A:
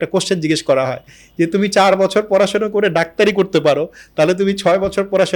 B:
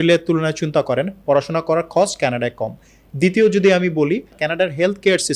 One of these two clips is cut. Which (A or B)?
B